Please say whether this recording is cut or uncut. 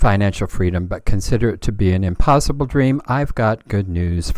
uncut